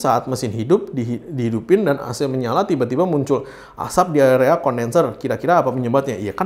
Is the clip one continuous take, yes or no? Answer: yes